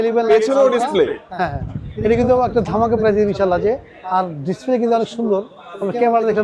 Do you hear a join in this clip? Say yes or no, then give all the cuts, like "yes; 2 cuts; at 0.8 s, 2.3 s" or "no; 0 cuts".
no; 0 cuts